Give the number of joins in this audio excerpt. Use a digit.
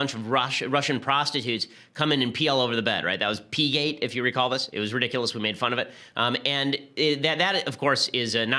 1